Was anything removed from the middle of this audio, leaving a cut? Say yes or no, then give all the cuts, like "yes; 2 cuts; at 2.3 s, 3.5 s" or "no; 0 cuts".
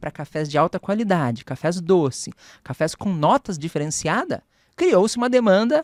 no; 0 cuts